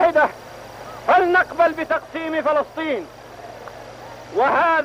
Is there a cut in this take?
no; 0 cuts

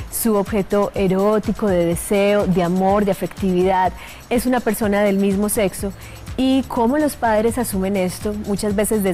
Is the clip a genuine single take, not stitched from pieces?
yes; 0 cuts

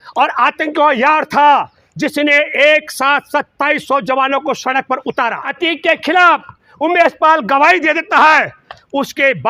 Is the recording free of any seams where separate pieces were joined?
no; 1 cut; at 5.5 s

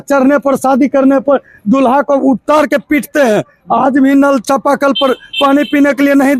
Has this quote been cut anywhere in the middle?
no; 0 cuts

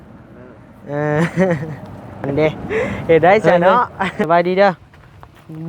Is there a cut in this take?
yes; 1 cut; at 4.3 s

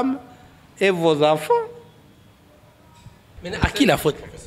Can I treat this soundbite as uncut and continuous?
no; 1 cut; at 3.4 s

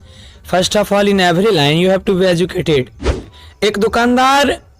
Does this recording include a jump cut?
yes; 1 cut; at 3.3 s

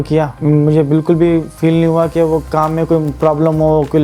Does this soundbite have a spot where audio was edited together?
no; 0 cuts

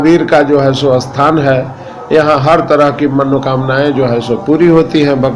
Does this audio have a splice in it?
no; 0 cuts

